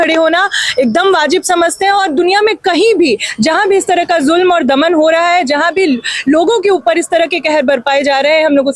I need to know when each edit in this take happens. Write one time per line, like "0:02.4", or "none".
none